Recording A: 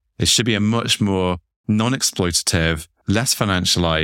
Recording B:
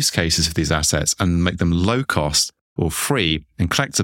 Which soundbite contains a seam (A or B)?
A